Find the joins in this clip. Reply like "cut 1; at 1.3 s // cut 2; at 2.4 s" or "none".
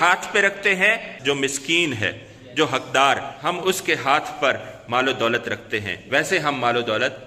cut 1; at 1.1 s // cut 2; at 3.3 s